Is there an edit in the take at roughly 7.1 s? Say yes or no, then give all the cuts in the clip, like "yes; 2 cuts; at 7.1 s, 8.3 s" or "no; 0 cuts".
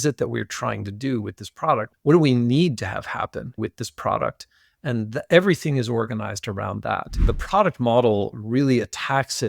yes; 2 cuts; at 1.9 s, 7.1 s